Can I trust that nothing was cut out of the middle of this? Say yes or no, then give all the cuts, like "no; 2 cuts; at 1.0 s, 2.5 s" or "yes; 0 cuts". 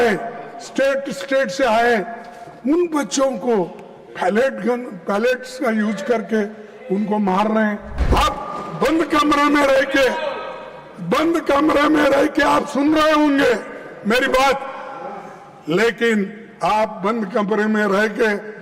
no; 1 cut; at 8.0 s